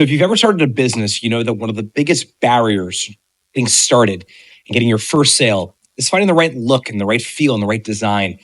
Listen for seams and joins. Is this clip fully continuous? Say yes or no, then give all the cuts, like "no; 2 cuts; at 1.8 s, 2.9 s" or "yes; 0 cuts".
yes; 0 cuts